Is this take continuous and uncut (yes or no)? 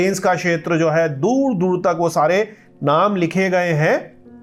yes